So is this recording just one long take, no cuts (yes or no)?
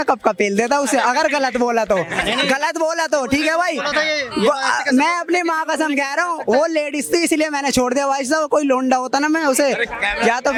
yes